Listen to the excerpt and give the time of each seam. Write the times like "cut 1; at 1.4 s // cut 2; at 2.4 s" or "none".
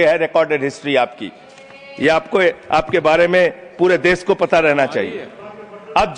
none